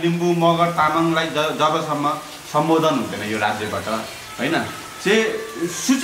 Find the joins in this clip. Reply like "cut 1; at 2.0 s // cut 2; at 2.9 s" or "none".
none